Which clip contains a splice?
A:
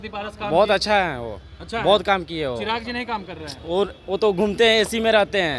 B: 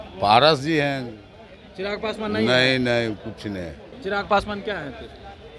B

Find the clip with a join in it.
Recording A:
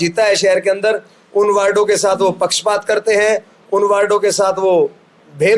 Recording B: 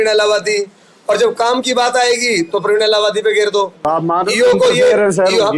B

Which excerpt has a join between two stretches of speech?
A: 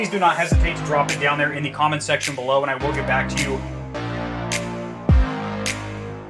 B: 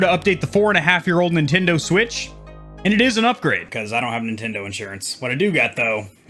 B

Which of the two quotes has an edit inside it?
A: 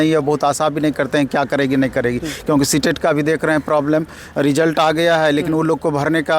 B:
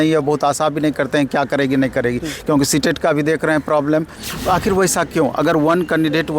B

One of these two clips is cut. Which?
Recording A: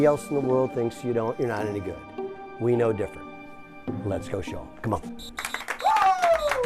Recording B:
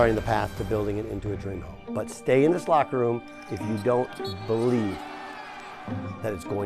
B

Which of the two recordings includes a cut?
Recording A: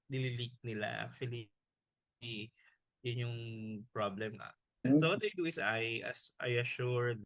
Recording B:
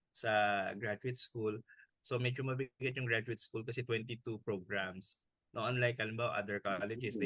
A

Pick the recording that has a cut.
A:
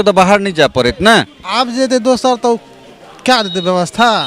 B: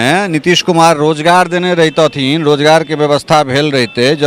A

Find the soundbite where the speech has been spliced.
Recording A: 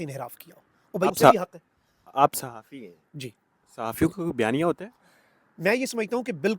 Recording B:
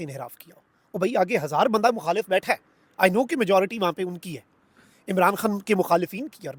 A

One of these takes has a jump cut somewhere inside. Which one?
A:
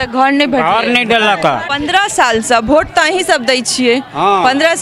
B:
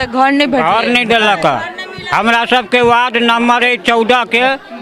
A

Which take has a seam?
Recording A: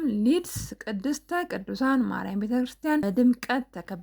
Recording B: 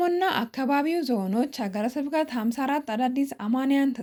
A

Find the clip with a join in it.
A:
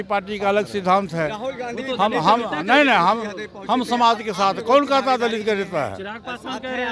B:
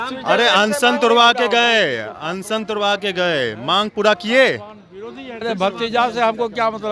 B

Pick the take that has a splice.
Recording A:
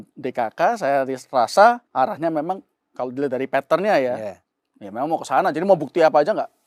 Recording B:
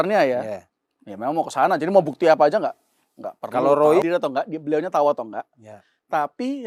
B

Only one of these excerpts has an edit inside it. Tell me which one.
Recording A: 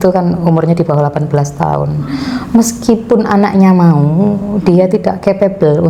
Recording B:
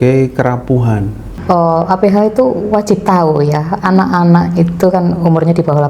B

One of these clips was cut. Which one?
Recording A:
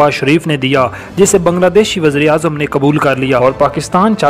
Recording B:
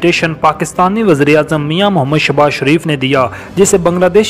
A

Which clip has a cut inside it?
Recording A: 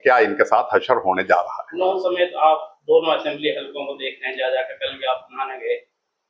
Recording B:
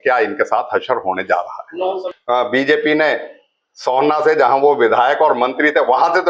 B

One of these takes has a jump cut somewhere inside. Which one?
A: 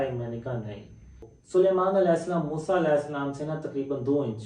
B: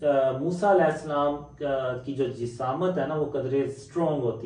A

